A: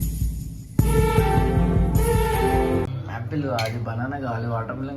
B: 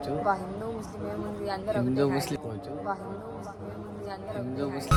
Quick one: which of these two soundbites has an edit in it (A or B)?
A